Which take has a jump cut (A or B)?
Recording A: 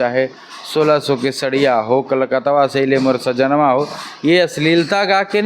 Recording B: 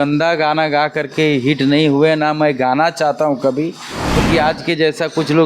B